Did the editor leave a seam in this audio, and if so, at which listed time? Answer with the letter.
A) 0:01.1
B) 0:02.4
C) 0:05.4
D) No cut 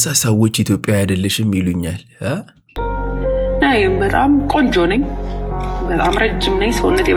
D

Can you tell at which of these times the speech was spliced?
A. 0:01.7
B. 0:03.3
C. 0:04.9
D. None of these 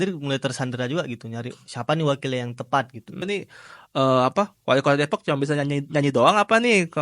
B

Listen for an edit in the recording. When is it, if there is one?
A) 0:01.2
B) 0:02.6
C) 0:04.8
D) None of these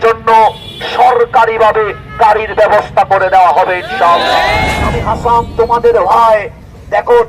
C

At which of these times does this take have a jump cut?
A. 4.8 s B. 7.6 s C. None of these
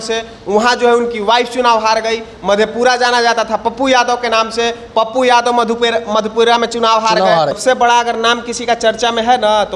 B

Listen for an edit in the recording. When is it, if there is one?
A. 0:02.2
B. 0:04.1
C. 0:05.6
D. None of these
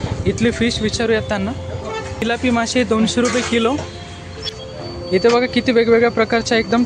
A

